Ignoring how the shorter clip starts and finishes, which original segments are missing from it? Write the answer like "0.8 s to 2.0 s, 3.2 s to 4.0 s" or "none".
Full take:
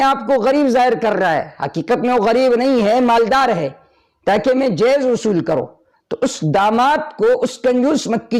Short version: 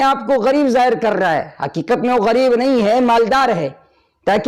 none